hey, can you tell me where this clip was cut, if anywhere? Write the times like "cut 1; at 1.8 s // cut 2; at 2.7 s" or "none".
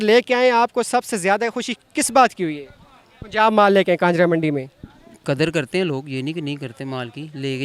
none